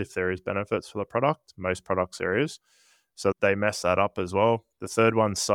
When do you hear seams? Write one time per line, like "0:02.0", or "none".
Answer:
none